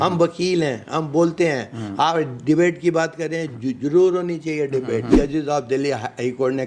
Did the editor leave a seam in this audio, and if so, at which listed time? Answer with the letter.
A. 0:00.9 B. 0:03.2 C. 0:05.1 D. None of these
C